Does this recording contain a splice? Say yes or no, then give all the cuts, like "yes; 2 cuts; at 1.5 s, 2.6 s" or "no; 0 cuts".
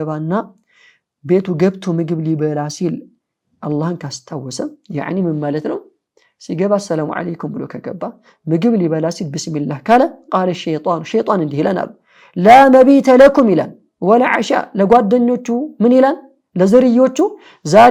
no; 0 cuts